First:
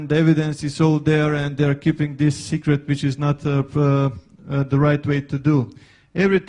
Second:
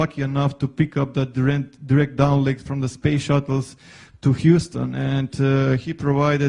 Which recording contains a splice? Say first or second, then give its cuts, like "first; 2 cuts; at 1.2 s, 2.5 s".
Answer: second; 1 cut; at 1.2 s